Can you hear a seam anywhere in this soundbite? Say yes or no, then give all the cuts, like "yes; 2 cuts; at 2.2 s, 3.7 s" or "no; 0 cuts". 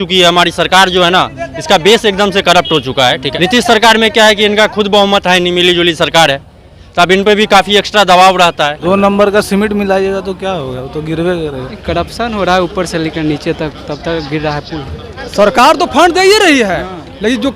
yes; 4 cuts; at 3.3 s, 8.8 s, 11.7 s, 15.2 s